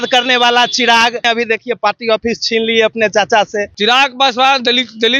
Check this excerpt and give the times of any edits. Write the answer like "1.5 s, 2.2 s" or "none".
1.2 s, 3.7 s